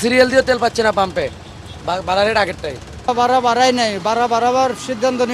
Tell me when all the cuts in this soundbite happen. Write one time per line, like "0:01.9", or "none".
none